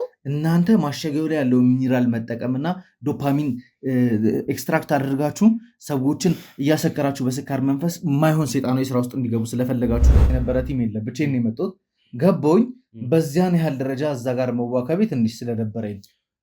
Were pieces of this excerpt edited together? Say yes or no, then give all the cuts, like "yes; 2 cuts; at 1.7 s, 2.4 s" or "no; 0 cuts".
yes; 1 cut; at 10.2 s